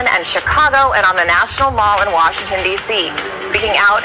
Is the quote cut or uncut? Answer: uncut